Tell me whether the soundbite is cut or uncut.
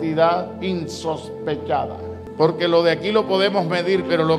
cut